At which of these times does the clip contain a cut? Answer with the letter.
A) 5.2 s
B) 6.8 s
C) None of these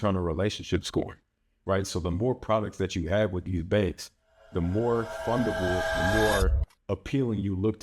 B